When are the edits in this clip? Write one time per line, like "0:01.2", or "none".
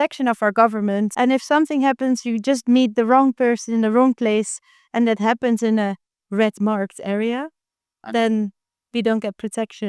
0:01.1